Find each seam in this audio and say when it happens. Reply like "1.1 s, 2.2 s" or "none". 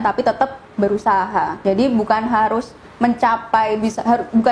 1.5 s